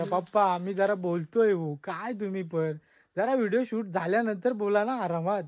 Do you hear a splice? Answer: no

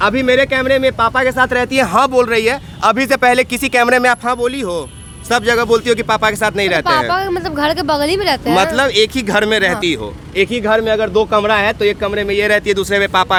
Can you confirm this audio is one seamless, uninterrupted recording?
yes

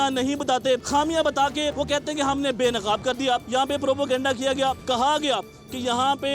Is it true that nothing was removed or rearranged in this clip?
no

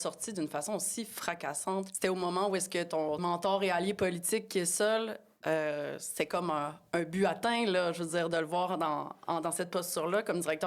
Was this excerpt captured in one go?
no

